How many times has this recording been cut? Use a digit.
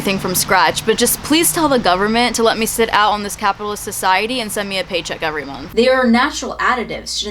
1